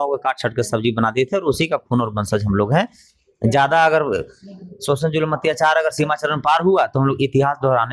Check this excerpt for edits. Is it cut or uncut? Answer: uncut